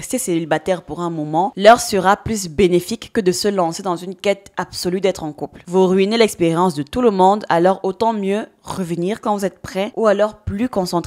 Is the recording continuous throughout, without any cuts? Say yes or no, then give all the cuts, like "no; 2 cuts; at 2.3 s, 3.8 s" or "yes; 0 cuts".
yes; 0 cuts